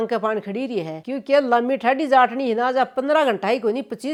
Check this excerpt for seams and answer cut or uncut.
uncut